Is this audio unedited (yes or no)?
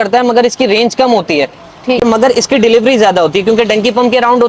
no